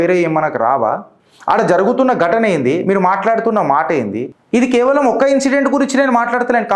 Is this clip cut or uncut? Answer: cut